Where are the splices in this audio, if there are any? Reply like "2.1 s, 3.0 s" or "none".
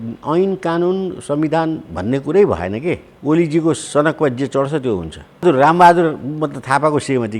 3.1 s, 5.4 s